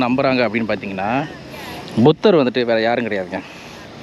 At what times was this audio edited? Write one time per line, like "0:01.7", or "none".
none